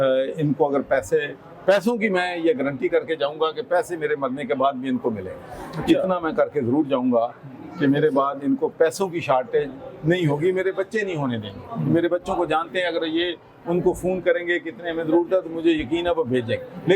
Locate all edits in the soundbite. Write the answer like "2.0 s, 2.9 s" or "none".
none